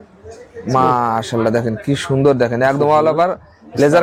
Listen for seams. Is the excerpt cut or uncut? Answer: uncut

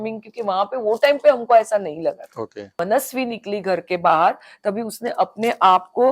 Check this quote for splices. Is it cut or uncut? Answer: cut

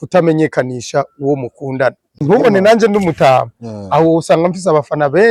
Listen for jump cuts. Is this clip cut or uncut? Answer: cut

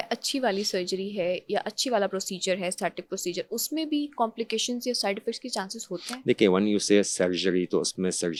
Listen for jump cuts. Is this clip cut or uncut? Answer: uncut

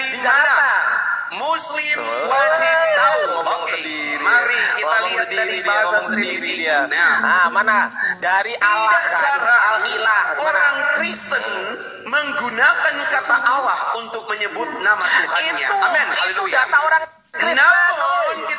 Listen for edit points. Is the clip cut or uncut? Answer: cut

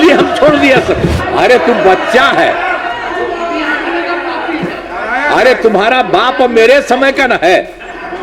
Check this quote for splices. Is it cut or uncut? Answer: cut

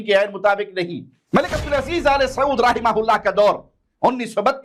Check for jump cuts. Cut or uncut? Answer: cut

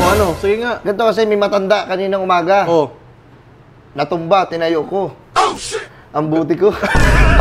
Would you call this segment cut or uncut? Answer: uncut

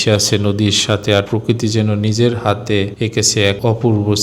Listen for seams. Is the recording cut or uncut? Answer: uncut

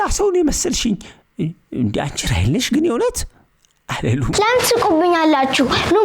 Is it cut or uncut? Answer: cut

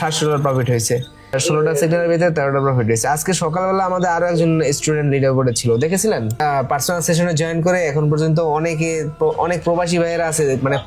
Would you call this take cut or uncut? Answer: cut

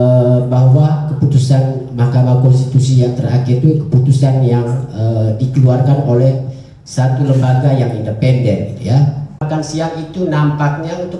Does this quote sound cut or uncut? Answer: cut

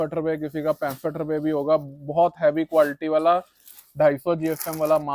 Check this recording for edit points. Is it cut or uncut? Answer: uncut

